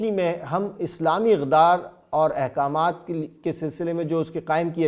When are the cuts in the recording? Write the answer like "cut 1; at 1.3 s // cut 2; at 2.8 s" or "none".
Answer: none